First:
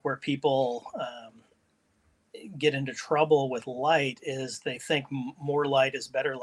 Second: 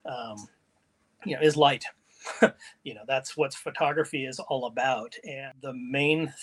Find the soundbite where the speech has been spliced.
second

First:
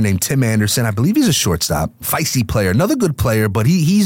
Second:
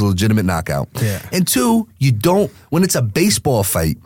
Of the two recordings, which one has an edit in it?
first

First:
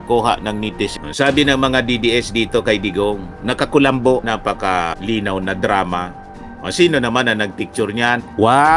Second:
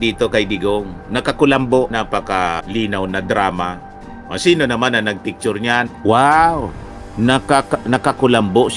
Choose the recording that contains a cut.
first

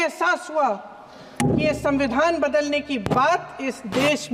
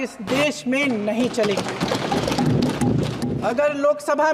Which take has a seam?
second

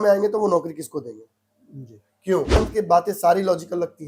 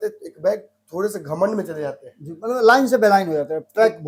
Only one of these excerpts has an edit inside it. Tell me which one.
first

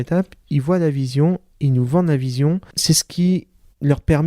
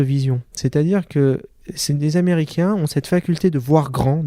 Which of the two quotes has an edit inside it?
first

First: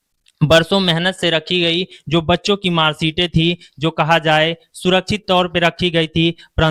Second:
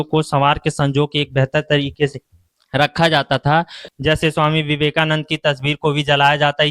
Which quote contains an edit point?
second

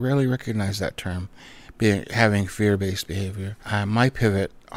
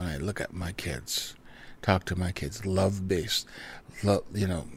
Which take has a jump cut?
first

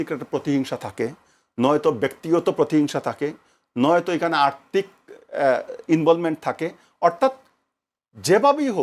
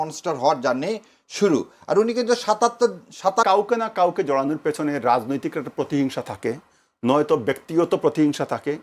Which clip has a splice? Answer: second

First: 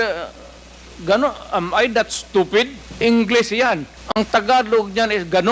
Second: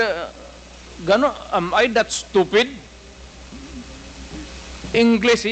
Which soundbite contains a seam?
first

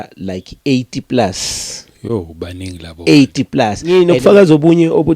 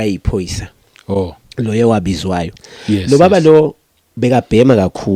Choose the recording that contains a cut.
first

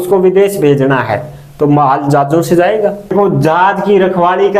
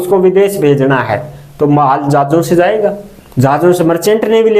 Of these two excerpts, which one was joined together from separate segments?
first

